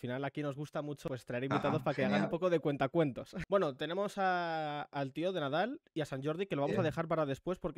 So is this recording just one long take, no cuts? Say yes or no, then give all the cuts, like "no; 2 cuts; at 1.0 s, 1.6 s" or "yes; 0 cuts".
no; 2 cuts; at 1.0 s, 3.3 s